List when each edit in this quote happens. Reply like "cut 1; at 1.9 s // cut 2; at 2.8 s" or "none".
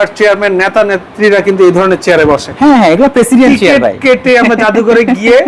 none